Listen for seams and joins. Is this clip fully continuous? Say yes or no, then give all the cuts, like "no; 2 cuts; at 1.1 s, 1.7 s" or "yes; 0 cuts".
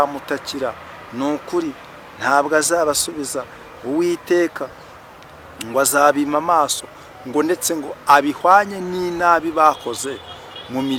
yes; 0 cuts